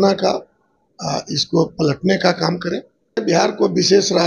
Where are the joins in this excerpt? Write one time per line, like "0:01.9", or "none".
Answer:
0:03.2